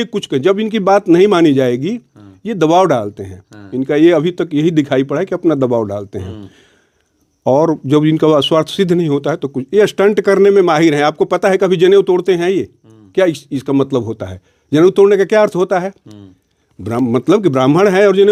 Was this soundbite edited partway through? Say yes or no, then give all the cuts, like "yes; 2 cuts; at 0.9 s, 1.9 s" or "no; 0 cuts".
no; 0 cuts